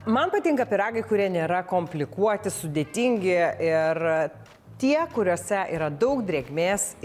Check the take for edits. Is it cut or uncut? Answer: uncut